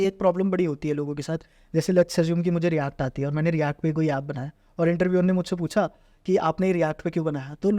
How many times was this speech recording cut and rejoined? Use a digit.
0